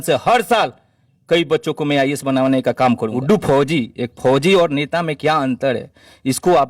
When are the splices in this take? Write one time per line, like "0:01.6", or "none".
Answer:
0:03.1